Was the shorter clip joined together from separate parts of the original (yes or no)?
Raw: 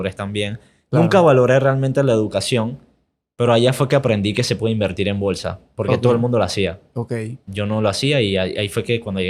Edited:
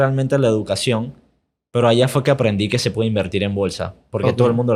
no